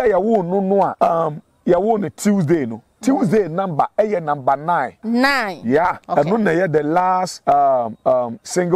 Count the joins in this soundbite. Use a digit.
4